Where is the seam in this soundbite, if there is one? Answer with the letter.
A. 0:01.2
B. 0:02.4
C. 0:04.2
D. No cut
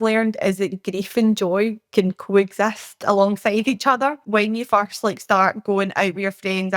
C